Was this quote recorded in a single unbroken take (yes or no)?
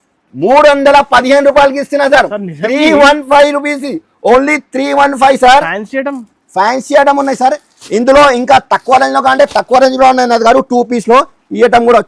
yes